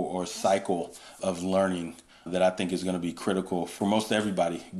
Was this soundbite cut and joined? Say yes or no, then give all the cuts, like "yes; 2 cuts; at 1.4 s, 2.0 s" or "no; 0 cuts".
yes; 2 cuts; at 1.1 s, 3.7 s